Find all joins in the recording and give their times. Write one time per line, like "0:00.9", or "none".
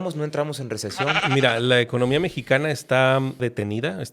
0:01.2
0:03.4